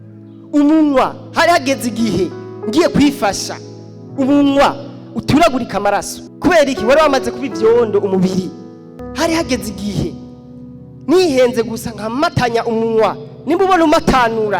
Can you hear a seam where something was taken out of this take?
yes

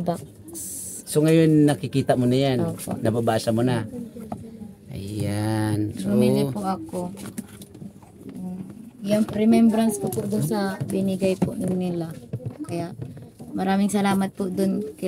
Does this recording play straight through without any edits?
yes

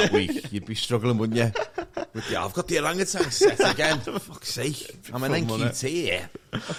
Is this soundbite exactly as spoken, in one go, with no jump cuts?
yes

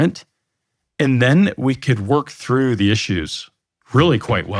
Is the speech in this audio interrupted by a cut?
no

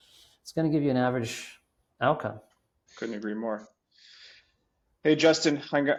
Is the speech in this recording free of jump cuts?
yes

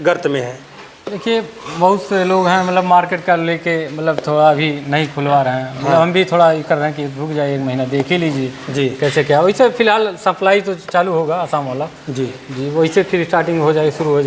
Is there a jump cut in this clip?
no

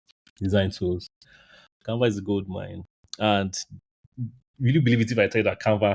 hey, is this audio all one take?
no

